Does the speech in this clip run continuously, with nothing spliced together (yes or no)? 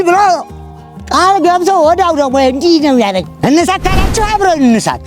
no